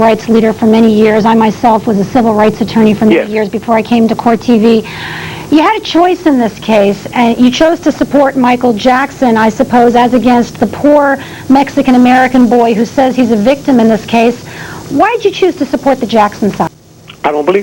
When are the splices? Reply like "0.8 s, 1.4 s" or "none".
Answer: 16.7 s